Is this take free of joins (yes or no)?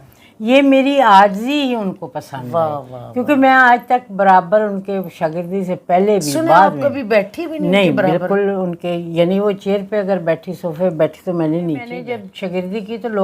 no